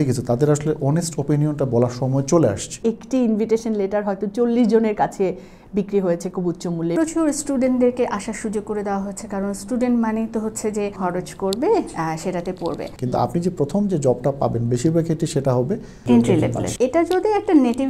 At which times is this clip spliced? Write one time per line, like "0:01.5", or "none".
0:02.8
0:06.9
0:10.9
0:12.9
0:16.6